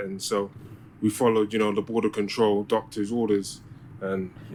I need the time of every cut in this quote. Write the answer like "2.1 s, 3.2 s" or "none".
none